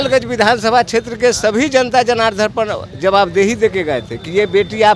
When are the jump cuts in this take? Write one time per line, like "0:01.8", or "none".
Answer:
none